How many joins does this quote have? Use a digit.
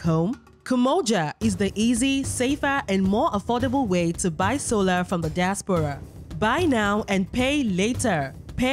0